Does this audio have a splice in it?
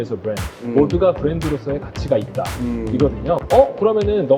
yes; 1 cut; at 3.4 s

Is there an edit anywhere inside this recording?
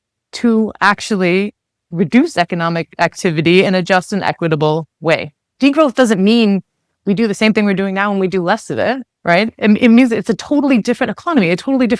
yes; 1 cut; at 5.4 s

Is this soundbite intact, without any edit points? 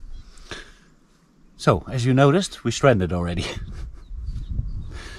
yes; 0 cuts

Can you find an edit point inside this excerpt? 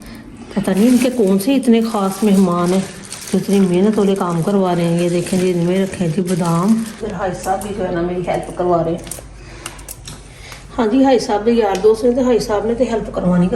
yes; 1 cut; at 7.0 s

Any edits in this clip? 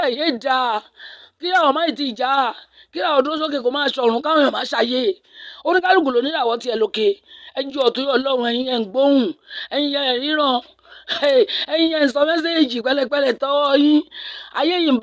no; 0 cuts

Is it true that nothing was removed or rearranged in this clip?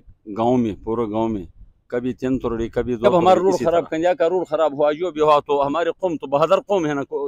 no; 1 cut; at 3.1 s

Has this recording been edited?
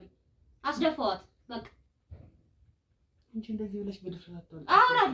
no; 0 cuts

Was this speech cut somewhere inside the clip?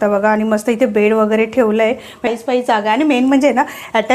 yes; 1 cut; at 2.3 s

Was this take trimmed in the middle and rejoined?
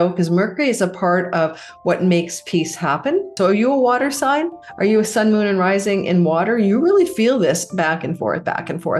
yes; 1 cut; at 3.3 s

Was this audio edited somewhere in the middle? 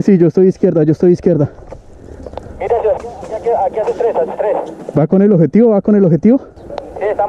yes; 1 cut; at 4.8 s

